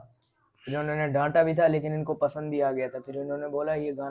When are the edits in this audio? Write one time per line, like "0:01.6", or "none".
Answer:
none